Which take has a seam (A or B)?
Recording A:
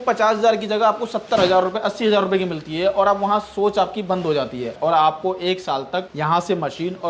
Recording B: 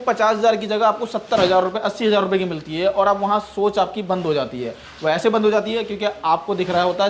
A